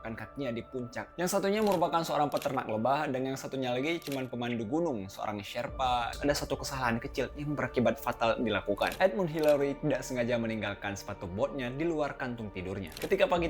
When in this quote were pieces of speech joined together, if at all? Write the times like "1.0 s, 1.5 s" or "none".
1.1 s, 6.1 s